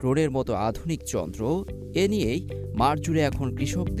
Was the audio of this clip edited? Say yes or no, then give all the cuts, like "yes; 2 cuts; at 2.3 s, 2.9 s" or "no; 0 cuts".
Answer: no; 0 cuts